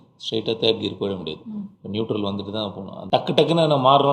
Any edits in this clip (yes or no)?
yes